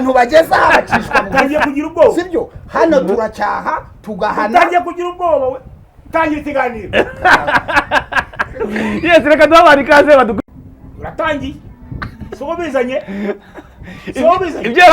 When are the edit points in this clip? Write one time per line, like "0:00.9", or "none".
0:10.4